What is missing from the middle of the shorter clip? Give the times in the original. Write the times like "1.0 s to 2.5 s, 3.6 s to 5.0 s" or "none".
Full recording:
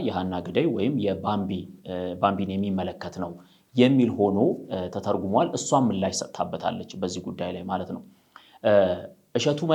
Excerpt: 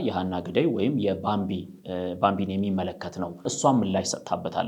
3.5 s to 5.6 s